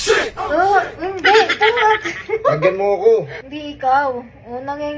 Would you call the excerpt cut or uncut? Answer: cut